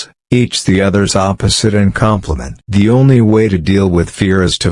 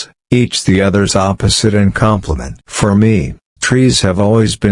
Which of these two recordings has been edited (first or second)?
first